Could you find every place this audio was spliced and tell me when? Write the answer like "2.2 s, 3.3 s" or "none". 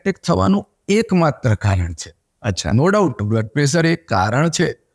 none